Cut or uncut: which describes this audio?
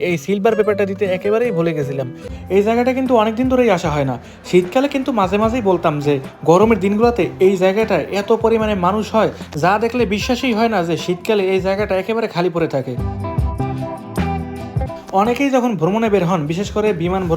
cut